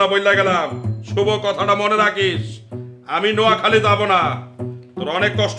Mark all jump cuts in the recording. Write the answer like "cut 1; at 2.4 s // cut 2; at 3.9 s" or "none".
none